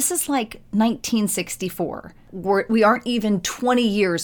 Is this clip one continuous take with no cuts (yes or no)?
no